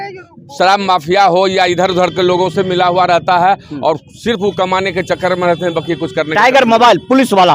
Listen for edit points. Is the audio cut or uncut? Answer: uncut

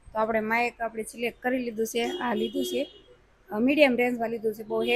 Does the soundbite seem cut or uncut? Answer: uncut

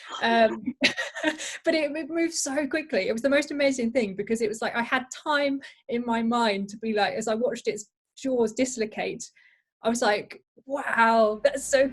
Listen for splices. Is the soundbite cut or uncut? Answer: uncut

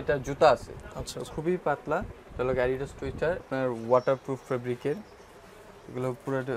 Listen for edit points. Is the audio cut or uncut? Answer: cut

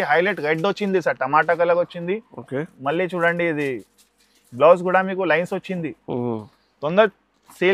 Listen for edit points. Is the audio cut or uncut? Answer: uncut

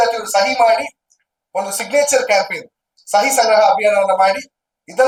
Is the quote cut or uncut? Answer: uncut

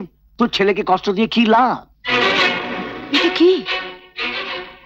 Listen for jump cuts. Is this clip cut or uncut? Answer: cut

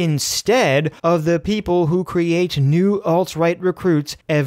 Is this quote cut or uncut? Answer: cut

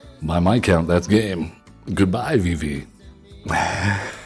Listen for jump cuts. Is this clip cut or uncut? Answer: uncut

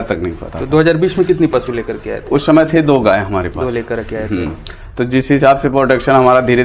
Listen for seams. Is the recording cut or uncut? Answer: uncut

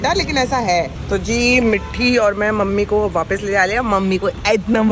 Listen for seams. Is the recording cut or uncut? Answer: uncut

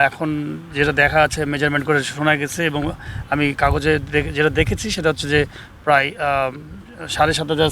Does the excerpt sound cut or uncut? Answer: uncut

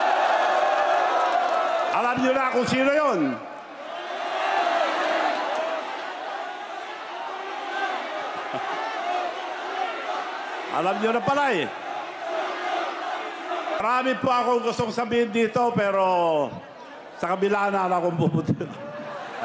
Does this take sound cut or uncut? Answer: cut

